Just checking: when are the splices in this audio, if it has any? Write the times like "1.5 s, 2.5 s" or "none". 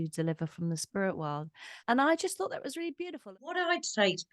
1.8 s, 3.2 s

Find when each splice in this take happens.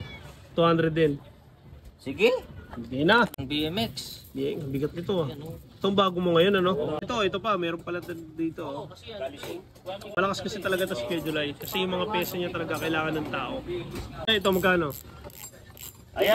3.4 s, 7.0 s, 14.3 s

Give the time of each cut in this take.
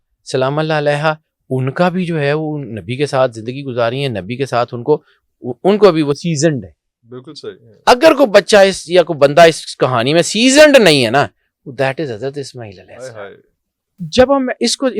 13.8 s

